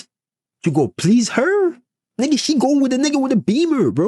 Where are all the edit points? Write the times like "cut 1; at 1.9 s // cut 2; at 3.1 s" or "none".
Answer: none